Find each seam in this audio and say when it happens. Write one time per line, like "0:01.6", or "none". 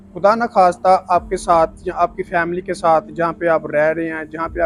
none